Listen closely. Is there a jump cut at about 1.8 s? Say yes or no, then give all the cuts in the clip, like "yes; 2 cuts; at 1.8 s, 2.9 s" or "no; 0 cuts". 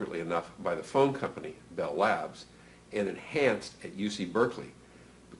no; 1 cut; at 3.5 s